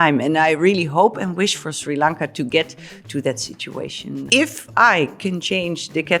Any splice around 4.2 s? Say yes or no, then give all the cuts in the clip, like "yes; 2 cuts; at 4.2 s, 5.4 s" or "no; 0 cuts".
yes; 1 cut; at 4.2 s